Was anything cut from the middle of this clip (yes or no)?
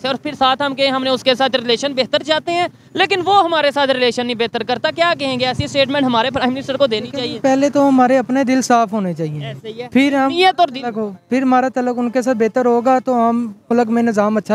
no